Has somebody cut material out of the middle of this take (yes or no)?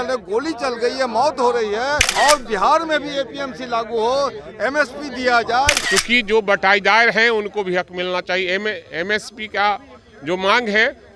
yes